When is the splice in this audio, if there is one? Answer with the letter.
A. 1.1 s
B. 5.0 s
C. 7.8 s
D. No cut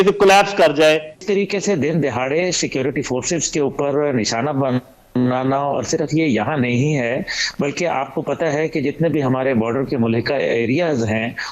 A